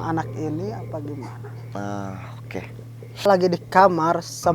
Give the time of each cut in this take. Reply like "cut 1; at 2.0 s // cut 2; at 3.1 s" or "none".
cut 1; at 3.2 s